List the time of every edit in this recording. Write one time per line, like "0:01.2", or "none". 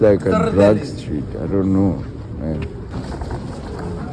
0:02.9